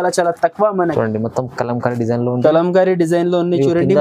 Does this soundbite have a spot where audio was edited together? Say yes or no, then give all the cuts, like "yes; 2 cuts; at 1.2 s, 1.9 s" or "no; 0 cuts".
yes; 1 cut; at 0.9 s